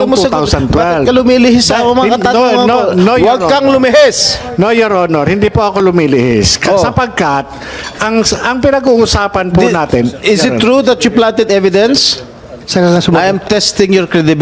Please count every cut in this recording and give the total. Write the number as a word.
one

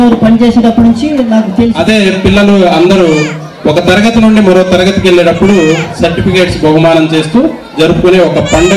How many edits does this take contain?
one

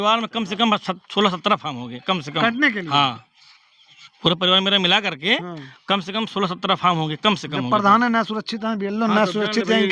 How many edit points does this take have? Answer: zero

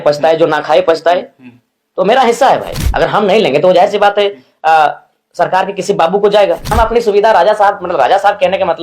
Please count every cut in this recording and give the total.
two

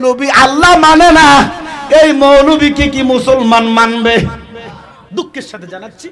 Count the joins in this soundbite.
one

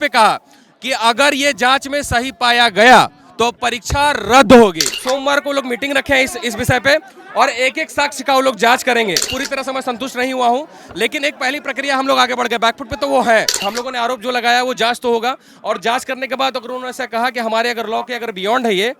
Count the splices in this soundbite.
three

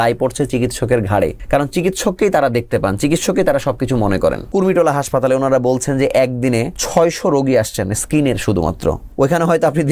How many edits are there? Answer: four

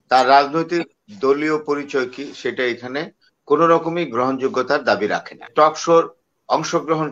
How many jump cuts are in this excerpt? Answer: one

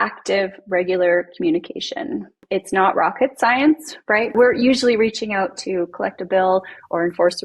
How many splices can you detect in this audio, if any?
two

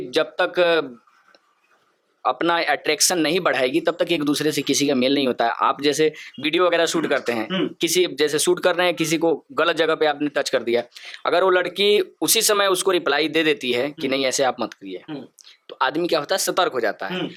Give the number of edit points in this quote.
zero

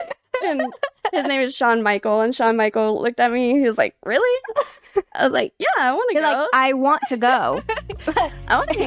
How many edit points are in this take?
zero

